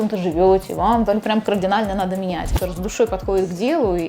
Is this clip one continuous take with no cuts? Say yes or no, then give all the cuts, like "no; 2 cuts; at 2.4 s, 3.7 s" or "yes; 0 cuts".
no; 1 cut; at 2.4 s